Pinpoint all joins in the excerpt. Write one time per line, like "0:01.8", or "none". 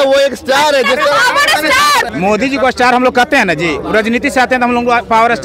none